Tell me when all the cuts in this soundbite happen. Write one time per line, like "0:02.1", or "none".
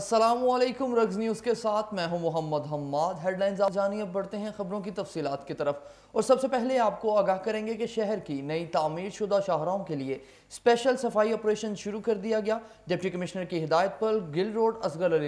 0:03.7